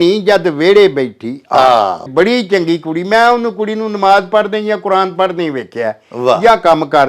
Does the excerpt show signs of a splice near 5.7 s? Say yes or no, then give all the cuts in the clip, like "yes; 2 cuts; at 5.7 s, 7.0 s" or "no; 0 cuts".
no; 1 cut; at 2.1 s